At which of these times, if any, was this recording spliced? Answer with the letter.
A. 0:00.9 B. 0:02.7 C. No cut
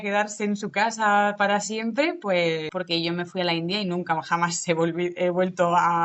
B